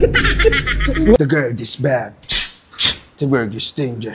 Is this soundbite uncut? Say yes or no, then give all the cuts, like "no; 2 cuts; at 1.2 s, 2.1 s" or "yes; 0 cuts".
no; 1 cut; at 1.2 s